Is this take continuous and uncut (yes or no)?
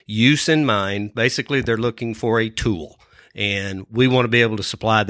yes